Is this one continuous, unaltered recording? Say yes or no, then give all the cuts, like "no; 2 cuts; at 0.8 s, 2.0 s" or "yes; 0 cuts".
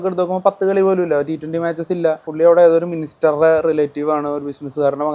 no; 1 cut; at 2.3 s